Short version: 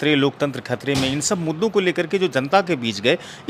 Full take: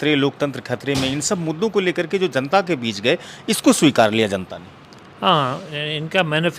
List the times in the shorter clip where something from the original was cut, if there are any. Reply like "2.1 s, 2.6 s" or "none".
none